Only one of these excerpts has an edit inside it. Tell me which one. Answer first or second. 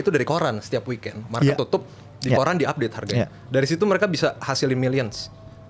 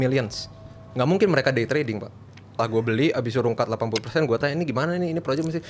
second